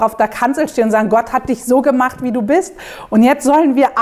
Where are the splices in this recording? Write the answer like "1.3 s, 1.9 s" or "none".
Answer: none